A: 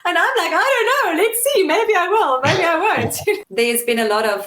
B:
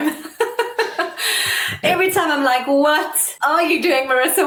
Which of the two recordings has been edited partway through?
A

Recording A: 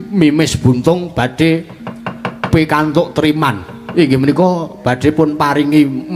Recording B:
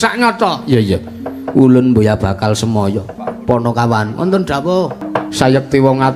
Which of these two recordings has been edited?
B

